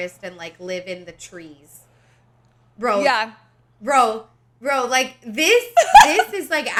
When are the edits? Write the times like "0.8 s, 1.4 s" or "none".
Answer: none

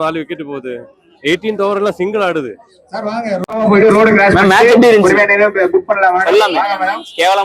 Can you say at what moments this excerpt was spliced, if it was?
3.4 s

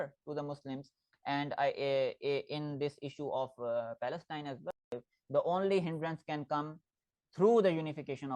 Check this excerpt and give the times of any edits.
4.9 s

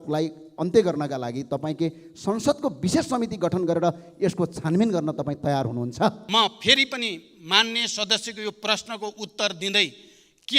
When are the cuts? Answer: 6.2 s

